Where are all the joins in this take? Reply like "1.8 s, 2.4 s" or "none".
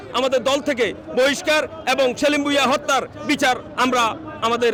none